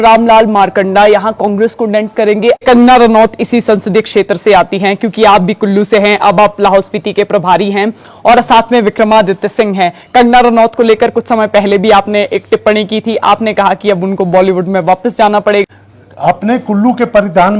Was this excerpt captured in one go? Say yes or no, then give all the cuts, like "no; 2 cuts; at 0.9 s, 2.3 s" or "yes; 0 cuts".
no; 2 cuts; at 2.6 s, 15.6 s